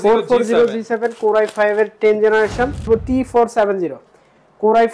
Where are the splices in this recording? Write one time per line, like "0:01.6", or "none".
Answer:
0:02.9